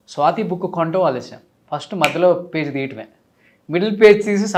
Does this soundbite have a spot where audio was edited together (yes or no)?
no